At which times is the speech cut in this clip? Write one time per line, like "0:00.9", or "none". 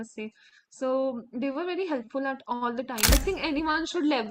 0:03.1